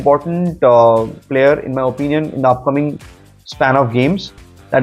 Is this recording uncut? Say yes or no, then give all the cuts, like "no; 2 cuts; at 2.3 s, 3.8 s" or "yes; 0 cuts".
yes; 0 cuts